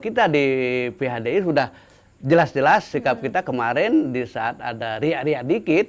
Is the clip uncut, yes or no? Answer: yes